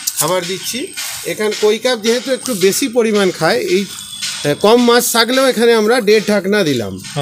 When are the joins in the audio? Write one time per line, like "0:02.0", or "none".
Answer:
none